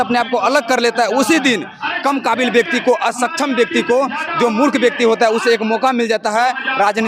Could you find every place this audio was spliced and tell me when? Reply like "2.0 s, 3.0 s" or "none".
none